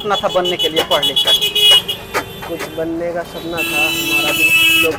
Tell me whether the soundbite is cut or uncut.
uncut